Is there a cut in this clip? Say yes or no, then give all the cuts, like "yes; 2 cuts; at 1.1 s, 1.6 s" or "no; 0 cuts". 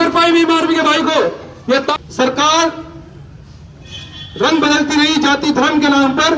yes; 1 cut; at 1.9 s